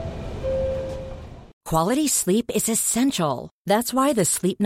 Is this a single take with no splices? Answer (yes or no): no